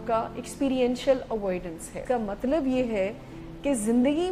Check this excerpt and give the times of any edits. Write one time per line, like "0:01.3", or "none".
0:01.9